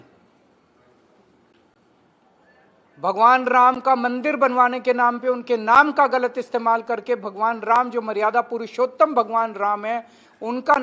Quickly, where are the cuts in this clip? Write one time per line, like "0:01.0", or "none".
none